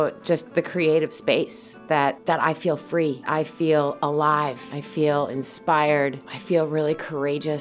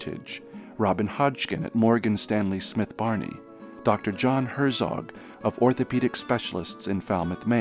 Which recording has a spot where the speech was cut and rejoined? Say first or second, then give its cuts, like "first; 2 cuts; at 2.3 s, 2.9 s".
first; 4 cuts; at 2.2 s, 3.2 s, 4.7 s, 6.3 s